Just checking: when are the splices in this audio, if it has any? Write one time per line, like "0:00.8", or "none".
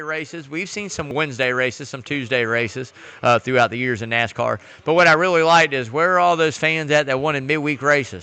0:01.1